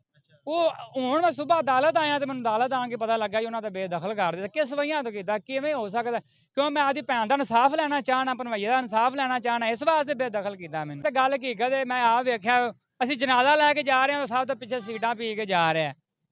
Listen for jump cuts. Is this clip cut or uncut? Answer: cut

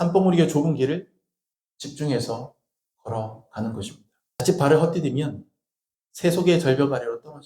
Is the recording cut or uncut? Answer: cut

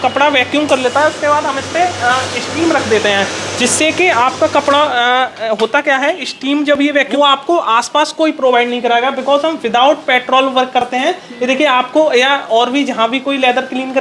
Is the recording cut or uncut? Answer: cut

